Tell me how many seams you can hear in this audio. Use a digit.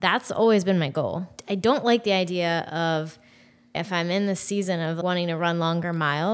3